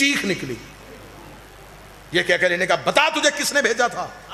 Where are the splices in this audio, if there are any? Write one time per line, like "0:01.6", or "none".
none